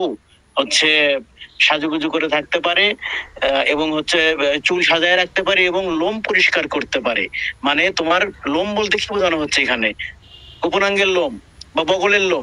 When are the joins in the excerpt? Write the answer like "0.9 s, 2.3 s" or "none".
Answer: none